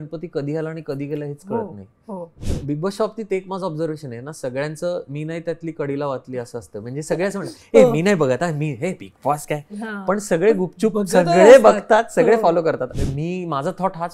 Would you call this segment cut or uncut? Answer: cut